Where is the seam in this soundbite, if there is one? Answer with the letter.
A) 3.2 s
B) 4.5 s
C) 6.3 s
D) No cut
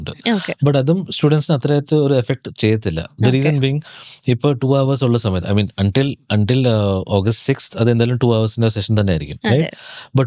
D